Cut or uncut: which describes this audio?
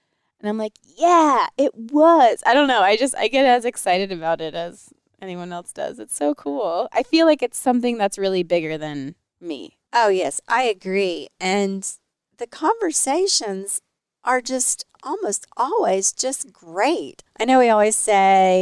uncut